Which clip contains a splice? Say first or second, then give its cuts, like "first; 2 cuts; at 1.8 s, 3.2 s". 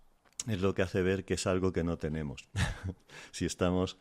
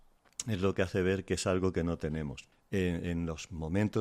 second; 1 cut; at 2.4 s